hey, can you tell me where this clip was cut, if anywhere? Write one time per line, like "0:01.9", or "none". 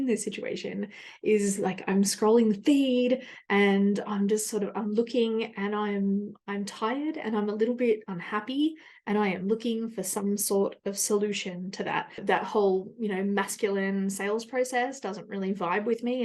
0:12.1